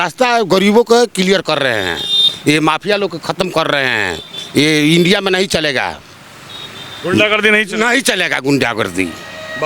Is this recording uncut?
yes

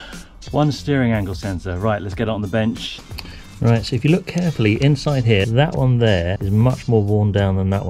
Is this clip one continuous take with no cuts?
no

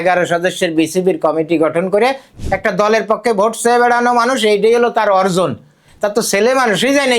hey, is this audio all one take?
no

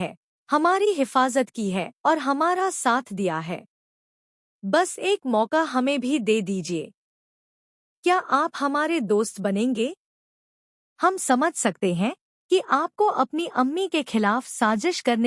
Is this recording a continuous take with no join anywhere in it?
yes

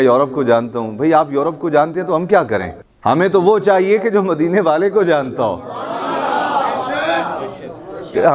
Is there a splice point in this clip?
no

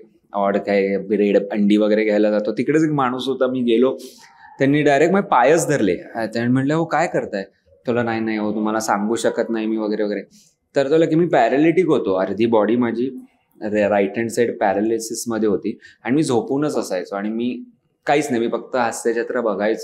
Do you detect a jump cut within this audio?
no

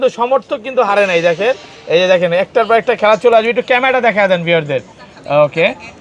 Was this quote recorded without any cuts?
yes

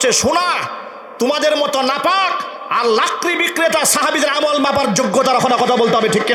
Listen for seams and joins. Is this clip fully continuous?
yes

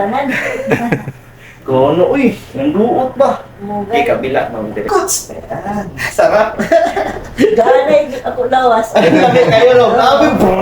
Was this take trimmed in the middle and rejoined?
yes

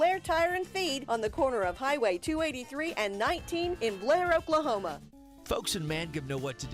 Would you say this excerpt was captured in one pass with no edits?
no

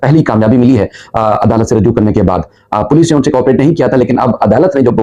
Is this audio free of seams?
yes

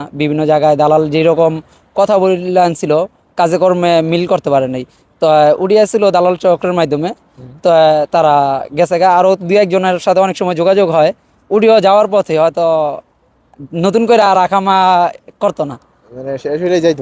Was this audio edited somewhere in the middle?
no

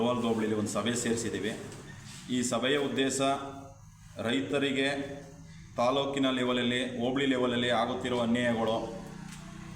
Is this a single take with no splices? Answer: yes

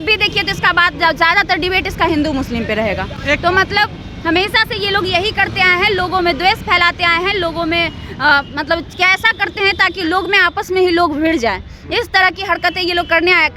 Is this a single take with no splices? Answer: yes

